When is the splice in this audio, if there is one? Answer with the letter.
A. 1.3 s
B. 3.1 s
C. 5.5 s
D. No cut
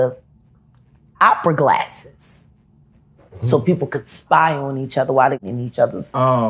C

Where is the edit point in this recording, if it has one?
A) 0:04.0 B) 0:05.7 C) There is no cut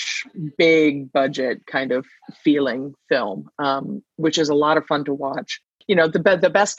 B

